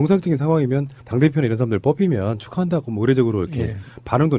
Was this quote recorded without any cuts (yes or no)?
no